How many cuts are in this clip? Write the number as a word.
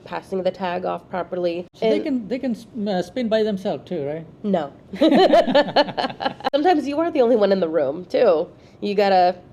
two